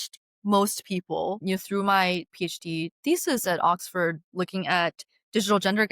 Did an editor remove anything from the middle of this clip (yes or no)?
yes